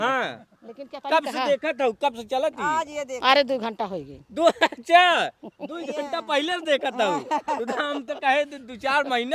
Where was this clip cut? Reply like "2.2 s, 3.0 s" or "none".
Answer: none